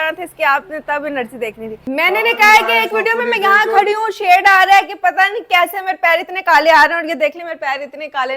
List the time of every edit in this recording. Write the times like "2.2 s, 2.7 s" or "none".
1.8 s

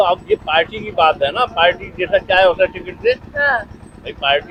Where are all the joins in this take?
none

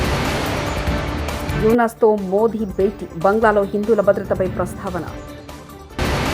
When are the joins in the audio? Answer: 1.5 s

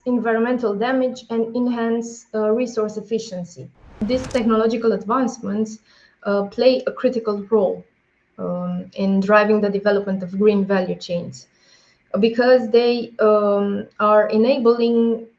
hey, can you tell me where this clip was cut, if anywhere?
4.0 s

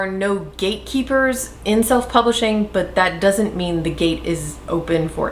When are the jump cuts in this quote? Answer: none

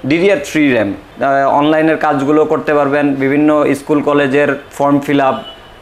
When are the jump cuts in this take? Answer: 1.1 s

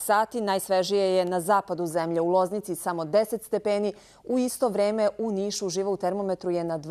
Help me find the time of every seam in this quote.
1.9 s

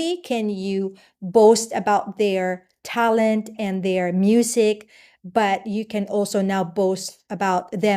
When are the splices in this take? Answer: none

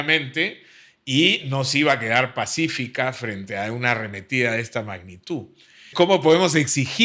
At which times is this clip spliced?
5.9 s

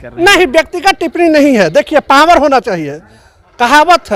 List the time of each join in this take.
none

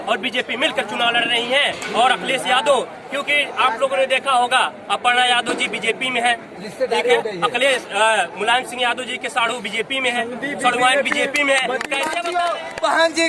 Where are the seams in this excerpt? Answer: 12.2 s

